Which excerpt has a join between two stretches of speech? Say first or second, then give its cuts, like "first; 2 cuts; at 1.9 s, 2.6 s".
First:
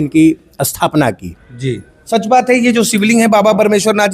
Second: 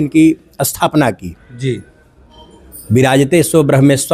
first; 1 cut; at 1.9 s